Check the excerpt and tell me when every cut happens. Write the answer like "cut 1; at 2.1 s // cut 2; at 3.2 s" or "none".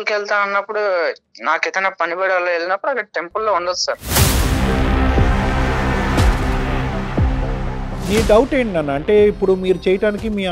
cut 1; at 4.0 s // cut 2; at 8.1 s